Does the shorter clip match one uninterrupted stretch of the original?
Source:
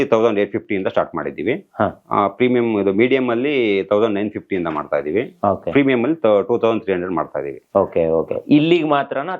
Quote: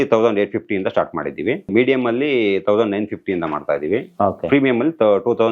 no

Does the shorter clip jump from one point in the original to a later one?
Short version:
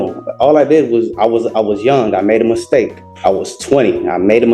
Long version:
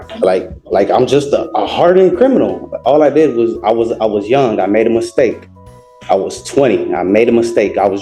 yes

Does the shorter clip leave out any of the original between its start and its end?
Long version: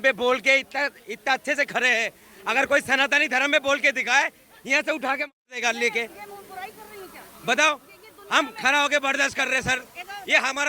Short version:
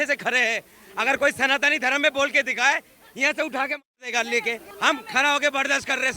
yes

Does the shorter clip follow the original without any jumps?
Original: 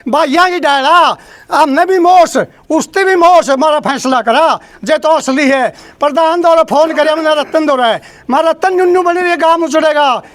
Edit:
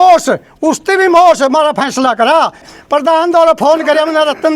no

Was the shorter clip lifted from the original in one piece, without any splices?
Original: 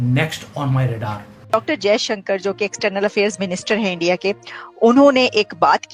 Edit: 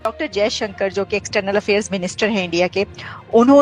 yes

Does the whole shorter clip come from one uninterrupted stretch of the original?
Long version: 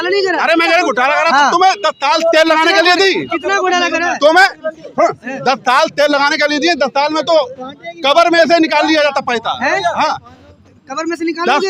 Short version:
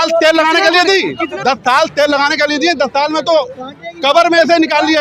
no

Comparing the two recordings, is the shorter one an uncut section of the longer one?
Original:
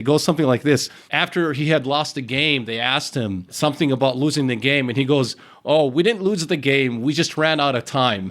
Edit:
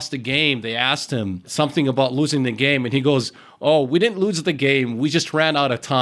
yes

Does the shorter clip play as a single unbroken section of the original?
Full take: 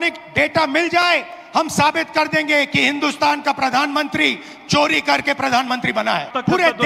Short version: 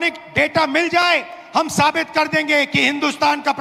yes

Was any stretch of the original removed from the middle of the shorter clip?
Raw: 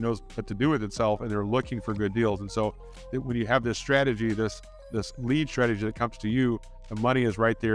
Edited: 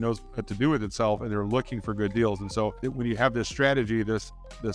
yes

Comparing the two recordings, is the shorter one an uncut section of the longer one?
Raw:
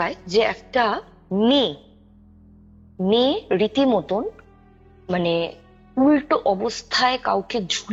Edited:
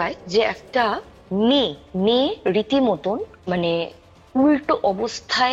no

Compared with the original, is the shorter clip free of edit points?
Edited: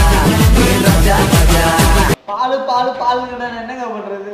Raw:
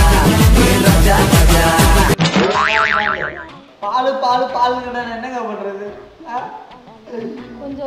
no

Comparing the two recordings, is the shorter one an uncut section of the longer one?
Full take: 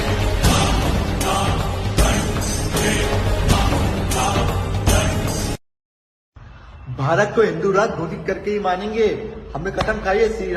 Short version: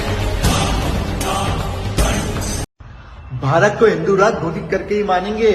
no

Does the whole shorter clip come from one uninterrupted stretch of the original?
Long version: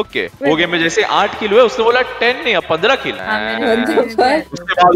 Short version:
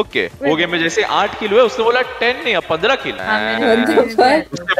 yes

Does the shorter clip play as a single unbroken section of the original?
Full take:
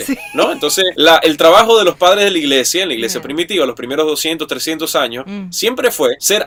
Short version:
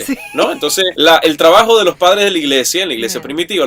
yes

